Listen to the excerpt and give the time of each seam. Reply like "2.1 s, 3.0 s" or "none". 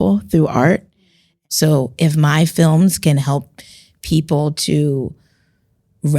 1.3 s